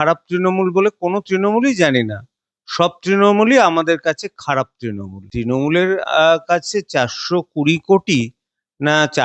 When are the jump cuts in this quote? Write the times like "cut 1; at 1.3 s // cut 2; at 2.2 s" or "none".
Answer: cut 1; at 5.3 s